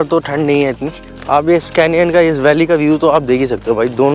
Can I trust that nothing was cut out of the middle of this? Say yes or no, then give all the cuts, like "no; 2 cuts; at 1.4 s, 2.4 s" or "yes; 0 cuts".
no; 1 cut; at 1.0 s